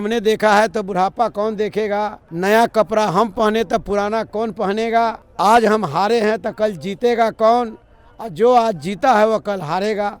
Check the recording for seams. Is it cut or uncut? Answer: cut